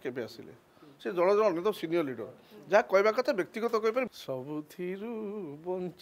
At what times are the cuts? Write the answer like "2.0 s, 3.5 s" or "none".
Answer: 4.1 s